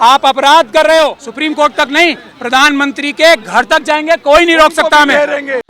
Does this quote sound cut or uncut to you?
cut